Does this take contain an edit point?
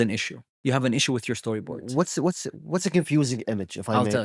no; 0 cuts

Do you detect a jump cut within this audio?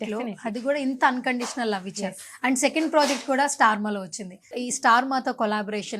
yes; 1 cut; at 4.5 s

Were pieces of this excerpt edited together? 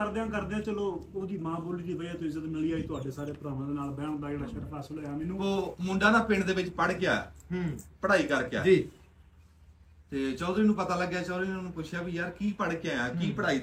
yes; 1 cut; at 5.4 s

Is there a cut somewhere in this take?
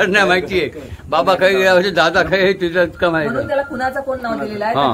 no; 0 cuts

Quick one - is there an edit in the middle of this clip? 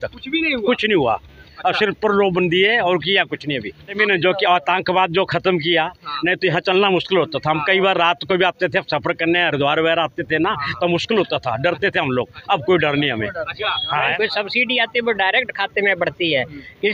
yes; 2 cuts; at 3.9 s, 14.1 s

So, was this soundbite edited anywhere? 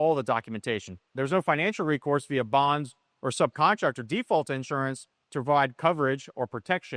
yes; 1 cut; at 1.1 s

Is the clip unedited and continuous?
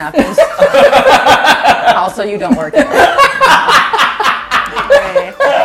yes; 0 cuts

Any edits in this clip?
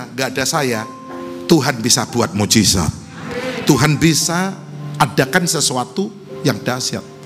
no; 0 cuts

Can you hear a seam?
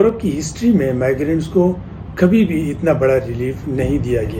no; 0 cuts

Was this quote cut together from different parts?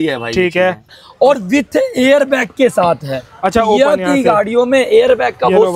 yes; 1 cut; at 0.9 s

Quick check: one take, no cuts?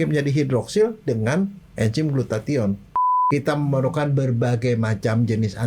no; 1 cut; at 3.1 s

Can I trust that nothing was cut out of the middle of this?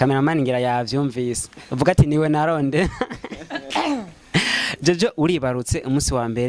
yes; 0 cuts

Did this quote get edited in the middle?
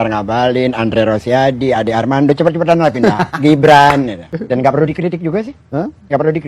yes; 1 cut; at 4.3 s

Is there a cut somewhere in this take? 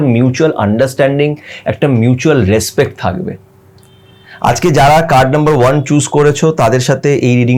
no; 0 cuts

